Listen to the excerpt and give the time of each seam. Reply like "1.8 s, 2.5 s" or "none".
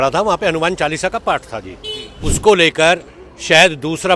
2.3 s